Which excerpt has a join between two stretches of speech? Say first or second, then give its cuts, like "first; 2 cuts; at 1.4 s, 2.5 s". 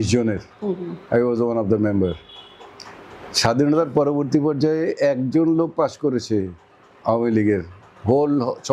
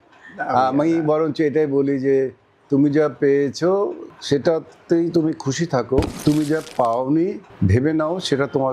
second; 3 cuts; at 4.1 s, 6.1 s, 7.5 s